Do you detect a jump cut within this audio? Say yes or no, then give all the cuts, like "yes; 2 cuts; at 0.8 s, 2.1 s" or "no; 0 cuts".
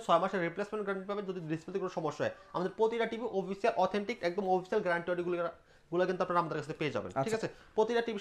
no; 0 cuts